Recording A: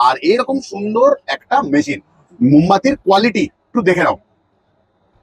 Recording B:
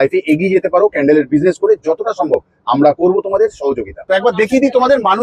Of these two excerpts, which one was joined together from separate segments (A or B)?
B